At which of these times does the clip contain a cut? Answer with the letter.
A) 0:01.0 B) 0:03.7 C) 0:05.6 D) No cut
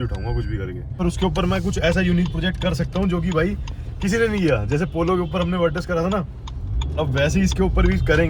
A